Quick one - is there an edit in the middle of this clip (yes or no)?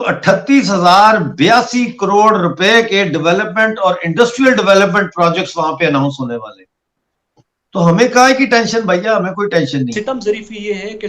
yes